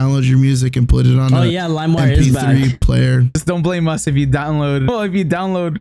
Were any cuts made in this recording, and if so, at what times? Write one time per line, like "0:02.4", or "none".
0:03.3
0:04.9